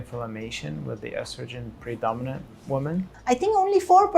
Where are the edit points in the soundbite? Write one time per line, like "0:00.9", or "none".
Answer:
0:03.1